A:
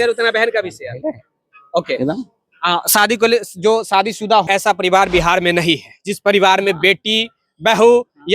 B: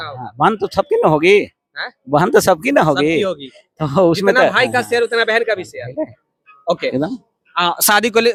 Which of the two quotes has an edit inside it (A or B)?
A